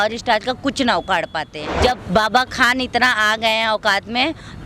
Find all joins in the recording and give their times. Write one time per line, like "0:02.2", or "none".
0:01.6